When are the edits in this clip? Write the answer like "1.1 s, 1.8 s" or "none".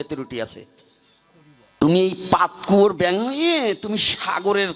1.7 s

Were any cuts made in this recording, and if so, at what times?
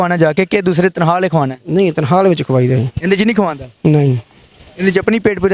none

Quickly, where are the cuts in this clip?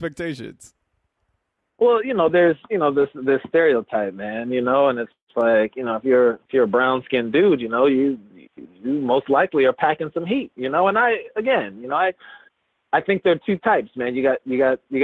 none

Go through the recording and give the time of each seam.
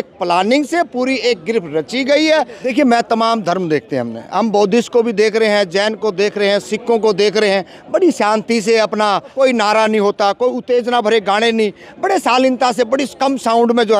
2.6 s, 9.3 s

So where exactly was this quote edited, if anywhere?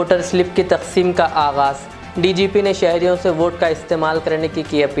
none

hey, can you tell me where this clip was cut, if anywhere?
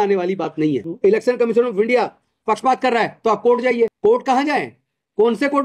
0.9 s, 3.9 s

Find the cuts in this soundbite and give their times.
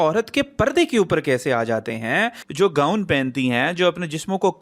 2.4 s

